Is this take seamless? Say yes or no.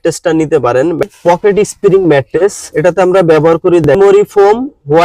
no